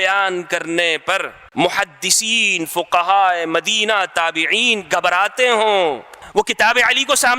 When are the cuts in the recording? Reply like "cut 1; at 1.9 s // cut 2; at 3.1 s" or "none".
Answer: cut 1; at 1.4 s // cut 2; at 6.1 s

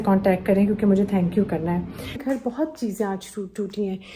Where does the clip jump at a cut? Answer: cut 1; at 2.2 s

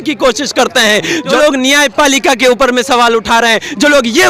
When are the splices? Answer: cut 1; at 1.3 s

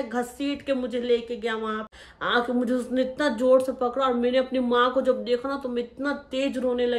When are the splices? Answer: cut 1; at 1.9 s

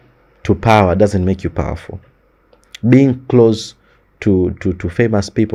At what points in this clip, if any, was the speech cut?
none

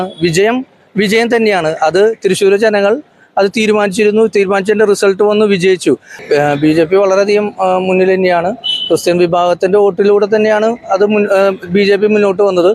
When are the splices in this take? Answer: cut 1; at 6.1 s

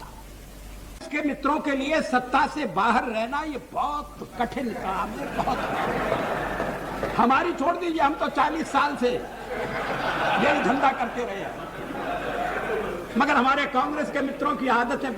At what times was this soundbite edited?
cut 1; at 1.1 s

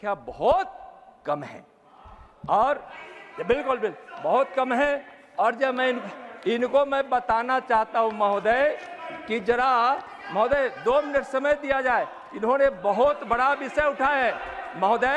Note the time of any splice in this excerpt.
none

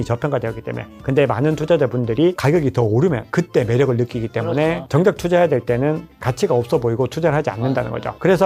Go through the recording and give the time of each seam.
cut 1; at 4.9 s // cut 2; at 6.1 s

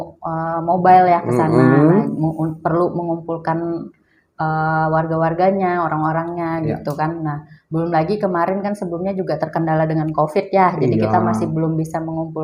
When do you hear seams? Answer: none

